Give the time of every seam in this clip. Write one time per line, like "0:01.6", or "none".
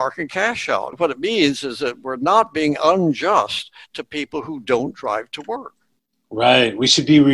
0:00.9